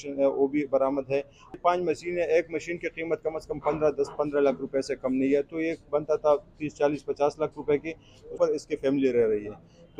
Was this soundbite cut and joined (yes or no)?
yes